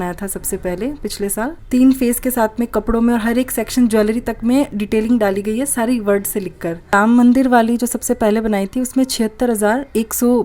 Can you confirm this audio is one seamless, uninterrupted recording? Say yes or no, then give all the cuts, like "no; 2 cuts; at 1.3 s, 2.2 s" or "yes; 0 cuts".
no; 2 cuts; at 1.6 s, 6.9 s